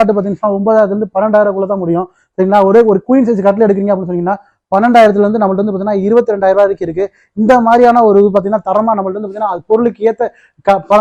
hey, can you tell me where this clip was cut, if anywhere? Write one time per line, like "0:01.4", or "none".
none